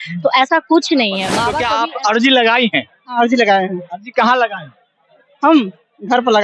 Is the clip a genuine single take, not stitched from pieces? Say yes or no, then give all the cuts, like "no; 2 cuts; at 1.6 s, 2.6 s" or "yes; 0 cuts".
no; 1 cut; at 1.5 s